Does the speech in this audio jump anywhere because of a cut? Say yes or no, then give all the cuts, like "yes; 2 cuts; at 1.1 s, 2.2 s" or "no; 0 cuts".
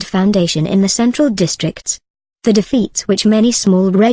yes; 1 cut; at 1.3 s